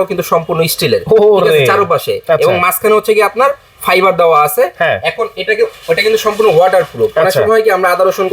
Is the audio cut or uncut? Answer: uncut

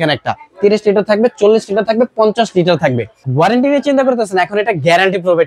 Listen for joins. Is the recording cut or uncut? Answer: cut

